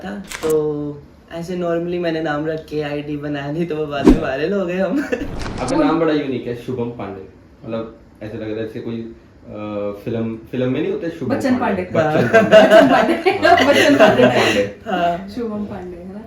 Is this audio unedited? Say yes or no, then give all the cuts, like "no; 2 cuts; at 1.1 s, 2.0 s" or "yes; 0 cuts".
no; 1 cut; at 5.3 s